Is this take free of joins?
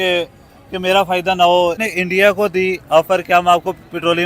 no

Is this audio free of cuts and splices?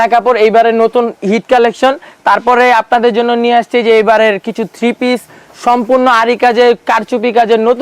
yes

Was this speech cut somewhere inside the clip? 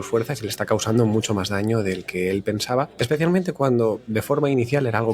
yes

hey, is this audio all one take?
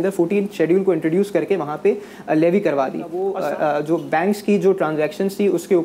no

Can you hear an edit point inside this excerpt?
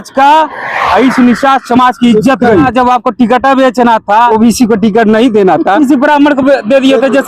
yes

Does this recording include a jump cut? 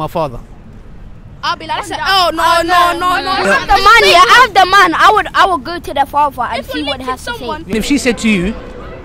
yes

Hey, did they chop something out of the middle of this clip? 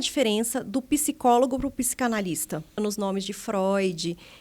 yes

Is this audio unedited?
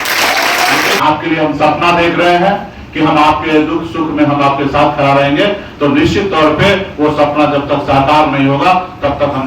no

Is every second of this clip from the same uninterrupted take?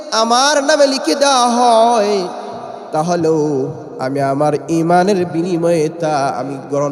yes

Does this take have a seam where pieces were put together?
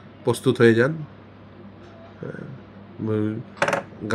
no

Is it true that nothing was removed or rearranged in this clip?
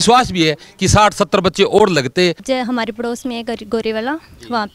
no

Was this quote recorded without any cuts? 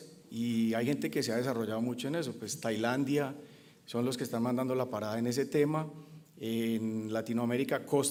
yes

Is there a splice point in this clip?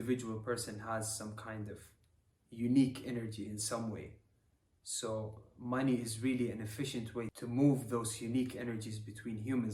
no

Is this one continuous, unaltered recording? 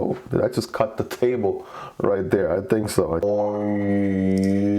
no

